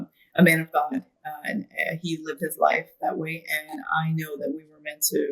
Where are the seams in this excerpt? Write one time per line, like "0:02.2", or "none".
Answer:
none